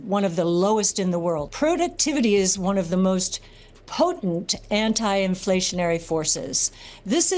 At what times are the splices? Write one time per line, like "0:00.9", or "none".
0:01.5